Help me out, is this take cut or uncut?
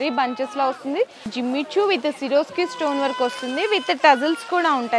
cut